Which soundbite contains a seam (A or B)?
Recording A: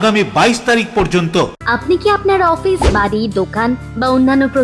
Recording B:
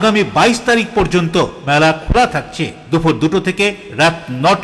A